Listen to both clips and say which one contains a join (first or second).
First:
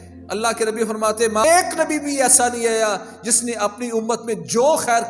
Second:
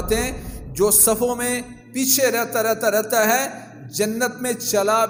first